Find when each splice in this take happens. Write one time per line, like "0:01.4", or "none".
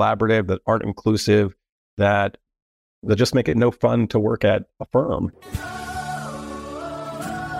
0:05.4